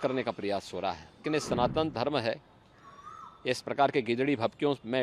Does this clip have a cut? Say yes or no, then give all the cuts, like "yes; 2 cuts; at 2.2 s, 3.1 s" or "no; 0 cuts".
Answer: yes; 1 cut; at 1.1 s